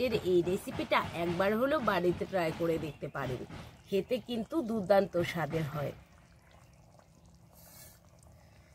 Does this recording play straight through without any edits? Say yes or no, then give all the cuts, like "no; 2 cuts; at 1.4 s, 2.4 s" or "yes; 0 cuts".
yes; 0 cuts